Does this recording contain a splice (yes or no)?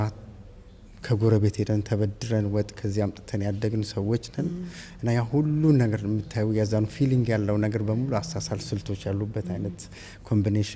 no